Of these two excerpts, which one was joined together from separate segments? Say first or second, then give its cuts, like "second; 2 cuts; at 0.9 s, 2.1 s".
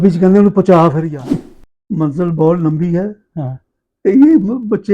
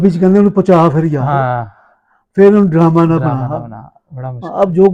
first; 1 cut; at 1.1 s